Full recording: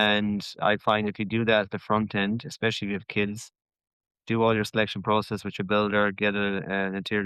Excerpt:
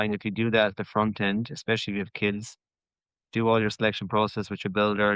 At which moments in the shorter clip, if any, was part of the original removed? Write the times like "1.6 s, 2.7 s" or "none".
none